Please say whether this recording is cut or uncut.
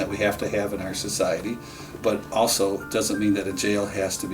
cut